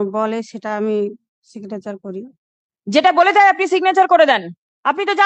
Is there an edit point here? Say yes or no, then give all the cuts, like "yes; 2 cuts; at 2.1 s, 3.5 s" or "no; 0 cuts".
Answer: no; 0 cuts